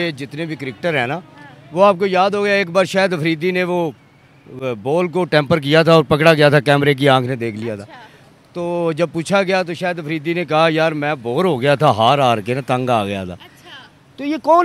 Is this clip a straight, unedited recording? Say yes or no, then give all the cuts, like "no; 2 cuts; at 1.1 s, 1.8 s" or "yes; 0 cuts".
yes; 0 cuts